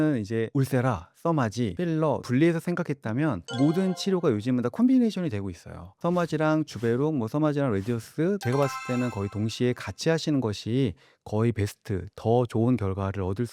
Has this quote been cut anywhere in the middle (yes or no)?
yes